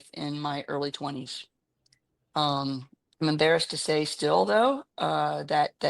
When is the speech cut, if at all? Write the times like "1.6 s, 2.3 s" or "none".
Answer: none